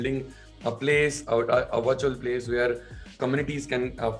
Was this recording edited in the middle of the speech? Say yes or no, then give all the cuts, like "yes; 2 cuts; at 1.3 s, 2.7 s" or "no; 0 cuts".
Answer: yes; 1 cut; at 3.2 s